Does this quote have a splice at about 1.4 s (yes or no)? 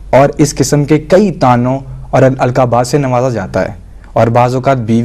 yes